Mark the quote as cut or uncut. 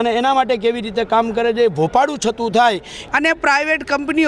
cut